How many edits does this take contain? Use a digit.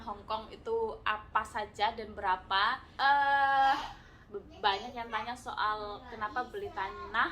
1